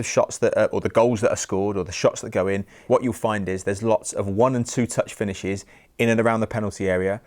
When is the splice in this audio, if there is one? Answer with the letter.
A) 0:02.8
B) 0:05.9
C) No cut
A